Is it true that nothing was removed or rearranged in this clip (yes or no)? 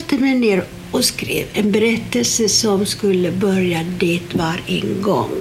no